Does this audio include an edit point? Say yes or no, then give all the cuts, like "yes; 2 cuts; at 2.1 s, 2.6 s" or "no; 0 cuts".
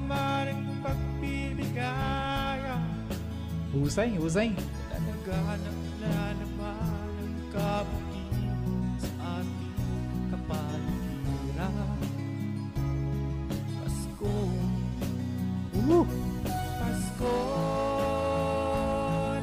no; 0 cuts